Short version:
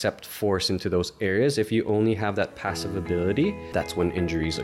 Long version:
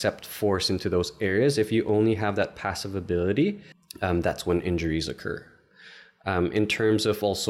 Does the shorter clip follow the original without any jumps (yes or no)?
no